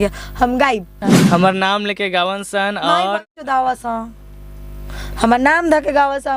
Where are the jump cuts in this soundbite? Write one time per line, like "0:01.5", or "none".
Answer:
0:01.1